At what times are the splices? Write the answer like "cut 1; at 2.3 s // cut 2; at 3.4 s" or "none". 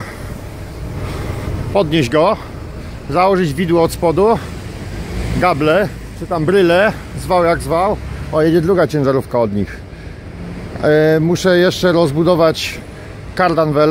none